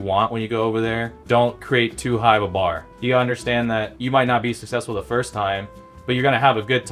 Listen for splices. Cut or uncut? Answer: cut